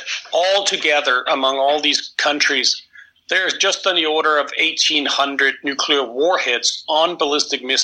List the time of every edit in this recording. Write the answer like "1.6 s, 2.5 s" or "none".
none